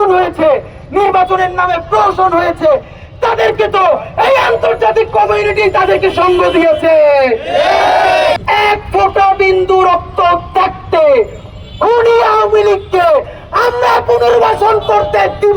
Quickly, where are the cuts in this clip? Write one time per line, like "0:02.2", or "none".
0:08.4